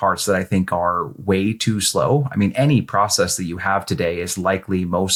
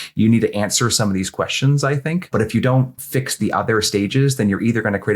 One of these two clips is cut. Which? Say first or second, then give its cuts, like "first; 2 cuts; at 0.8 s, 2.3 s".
second; 1 cut; at 2.3 s